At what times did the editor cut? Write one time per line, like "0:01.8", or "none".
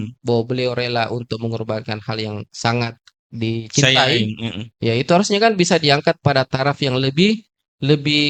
none